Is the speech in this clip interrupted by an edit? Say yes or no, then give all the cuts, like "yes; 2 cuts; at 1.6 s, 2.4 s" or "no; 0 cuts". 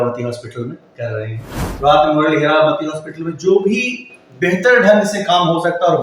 yes; 1 cut; at 1.6 s